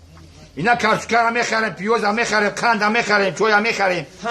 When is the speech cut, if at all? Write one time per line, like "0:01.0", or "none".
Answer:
none